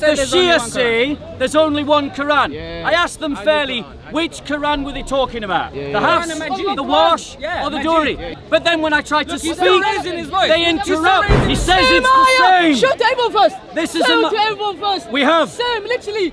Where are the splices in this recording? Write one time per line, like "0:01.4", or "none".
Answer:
0:08.3
0:11.4

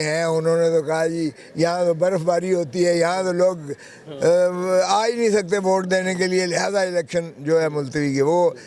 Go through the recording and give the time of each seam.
none

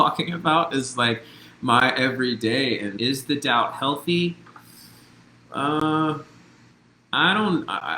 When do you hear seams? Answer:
0:02.9

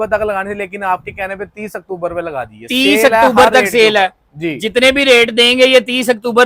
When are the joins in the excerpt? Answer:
none

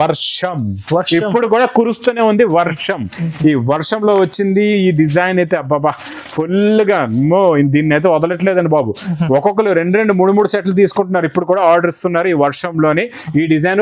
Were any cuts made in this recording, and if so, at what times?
none

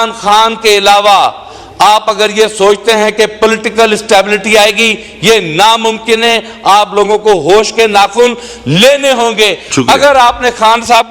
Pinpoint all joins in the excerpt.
none

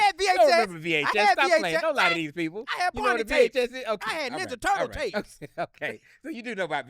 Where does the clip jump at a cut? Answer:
none

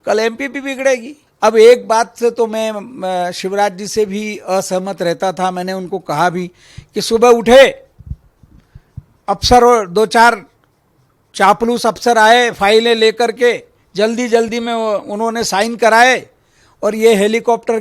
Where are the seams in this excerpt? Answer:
0:01.2

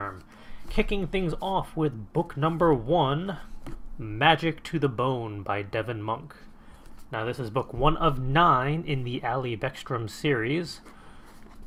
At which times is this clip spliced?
none

